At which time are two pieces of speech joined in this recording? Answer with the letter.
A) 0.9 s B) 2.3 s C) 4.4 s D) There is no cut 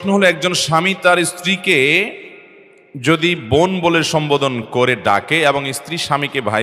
D